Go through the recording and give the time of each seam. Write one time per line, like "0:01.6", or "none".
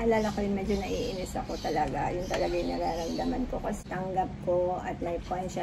0:03.8